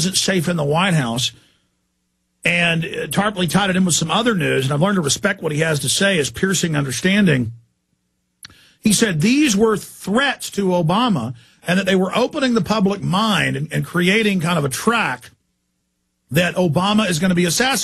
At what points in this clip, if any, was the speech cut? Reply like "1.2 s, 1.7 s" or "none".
none

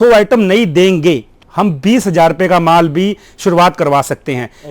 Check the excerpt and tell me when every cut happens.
1.3 s

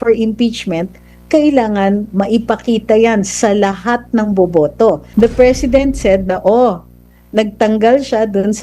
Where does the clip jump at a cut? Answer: 5.1 s

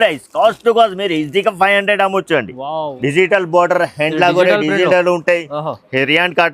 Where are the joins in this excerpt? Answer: 2.9 s

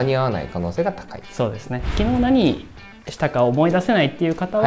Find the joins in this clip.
1.9 s

